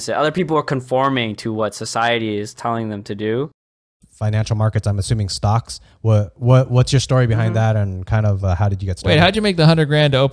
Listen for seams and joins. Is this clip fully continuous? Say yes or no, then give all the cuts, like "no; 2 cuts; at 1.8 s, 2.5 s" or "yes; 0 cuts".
no; 1 cut; at 3.7 s